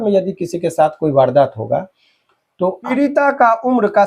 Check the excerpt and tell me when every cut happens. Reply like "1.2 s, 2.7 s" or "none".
2.9 s